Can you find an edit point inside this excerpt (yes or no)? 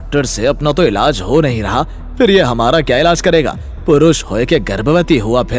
no